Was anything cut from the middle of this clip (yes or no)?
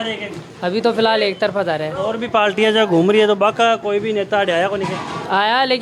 no